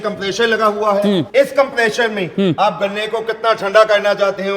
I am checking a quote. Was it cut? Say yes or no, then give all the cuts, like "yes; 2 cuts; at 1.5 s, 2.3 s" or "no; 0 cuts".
yes; 1 cut; at 1.3 s